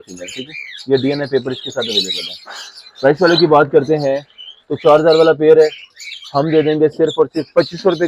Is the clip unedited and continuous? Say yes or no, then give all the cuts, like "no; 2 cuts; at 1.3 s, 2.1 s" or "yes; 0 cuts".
yes; 0 cuts